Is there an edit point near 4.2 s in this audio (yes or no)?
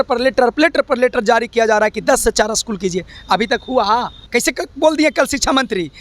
yes